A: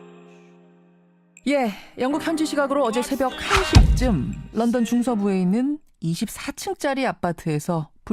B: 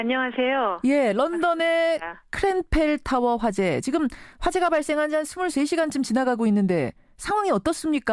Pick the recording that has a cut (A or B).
B